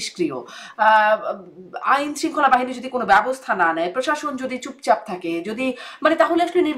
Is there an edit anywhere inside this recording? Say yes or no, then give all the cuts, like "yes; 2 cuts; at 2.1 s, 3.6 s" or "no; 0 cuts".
no; 0 cuts